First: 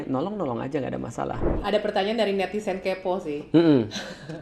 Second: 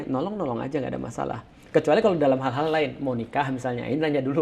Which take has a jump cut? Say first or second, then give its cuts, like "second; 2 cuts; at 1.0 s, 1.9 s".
first; 1 cut; at 1.6 s